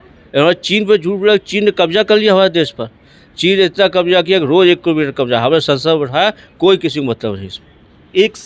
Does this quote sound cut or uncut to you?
uncut